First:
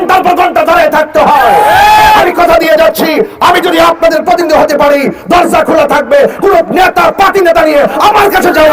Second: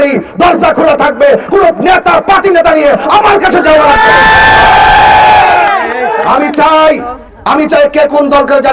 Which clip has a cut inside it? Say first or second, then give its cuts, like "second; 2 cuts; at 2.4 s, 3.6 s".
second; 1 cut; at 6.3 s